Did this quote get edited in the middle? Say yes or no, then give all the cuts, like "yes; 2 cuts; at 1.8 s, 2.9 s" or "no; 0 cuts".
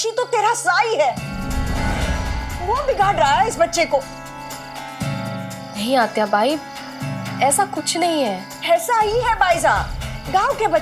yes; 1 cut; at 1.4 s